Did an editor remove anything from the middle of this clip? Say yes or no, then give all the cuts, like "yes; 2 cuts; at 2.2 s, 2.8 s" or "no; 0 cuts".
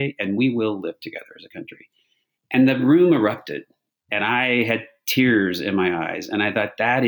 yes; 1 cut; at 4.1 s